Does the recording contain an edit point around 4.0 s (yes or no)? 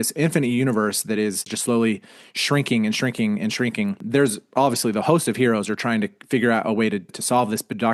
yes